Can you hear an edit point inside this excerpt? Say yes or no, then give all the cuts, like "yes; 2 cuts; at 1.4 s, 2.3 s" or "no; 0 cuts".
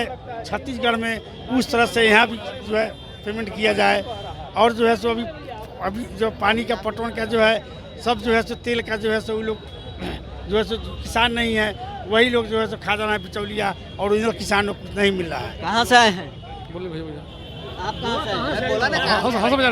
no; 0 cuts